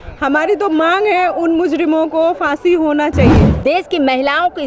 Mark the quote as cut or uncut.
cut